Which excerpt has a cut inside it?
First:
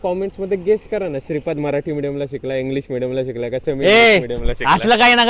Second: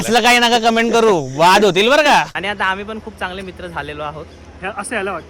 second; 1 cut; at 2.3 s

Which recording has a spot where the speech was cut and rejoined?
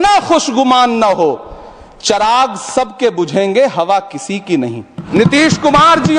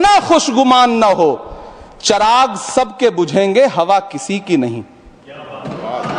first; 1 cut; at 5.1 s

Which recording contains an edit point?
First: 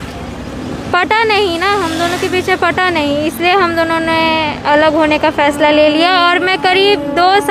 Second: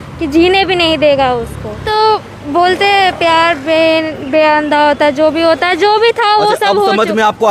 second; 1 cut; at 1.8 s

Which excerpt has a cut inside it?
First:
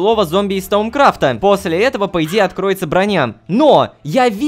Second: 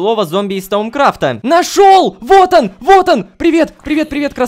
second; 1 cut; at 1.4 s

